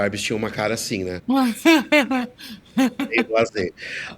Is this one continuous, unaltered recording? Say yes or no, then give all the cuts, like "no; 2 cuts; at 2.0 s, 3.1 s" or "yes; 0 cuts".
no; 1 cut; at 1.2 s